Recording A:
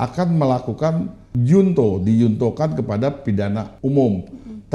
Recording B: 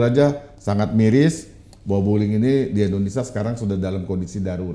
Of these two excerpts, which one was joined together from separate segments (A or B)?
A